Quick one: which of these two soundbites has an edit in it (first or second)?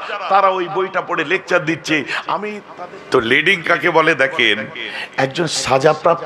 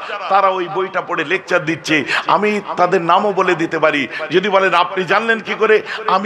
first